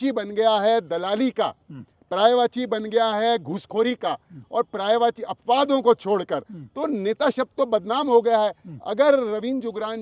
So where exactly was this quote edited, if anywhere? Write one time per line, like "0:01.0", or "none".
none

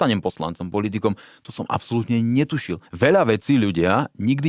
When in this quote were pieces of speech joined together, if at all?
0:02.8

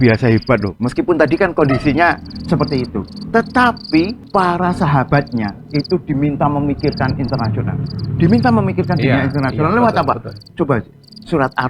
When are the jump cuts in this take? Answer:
0:04.2

